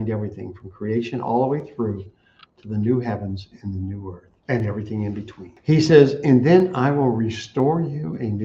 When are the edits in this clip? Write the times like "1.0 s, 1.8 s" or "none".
4.3 s, 5.4 s